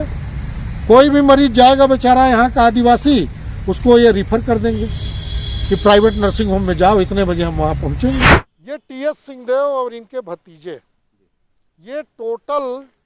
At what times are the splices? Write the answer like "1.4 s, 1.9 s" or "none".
8.5 s